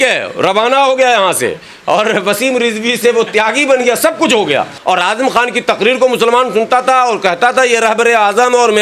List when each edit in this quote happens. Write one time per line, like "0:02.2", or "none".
0:04.7